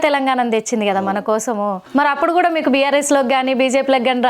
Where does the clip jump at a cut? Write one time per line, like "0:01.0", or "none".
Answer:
0:01.8